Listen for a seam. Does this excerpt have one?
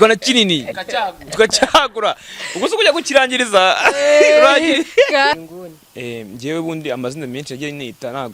yes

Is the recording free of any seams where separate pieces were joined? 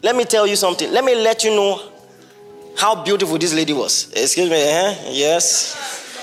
yes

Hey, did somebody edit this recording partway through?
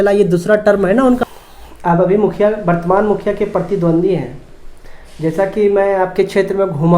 yes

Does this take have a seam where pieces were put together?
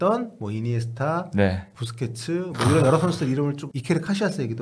yes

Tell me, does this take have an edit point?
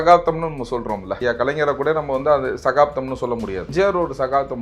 yes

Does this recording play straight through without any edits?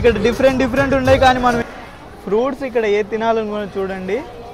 no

